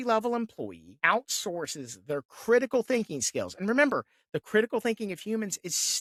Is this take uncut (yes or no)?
yes